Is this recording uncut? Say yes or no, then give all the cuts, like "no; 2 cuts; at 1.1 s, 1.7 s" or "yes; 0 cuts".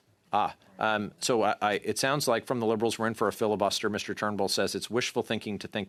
yes; 0 cuts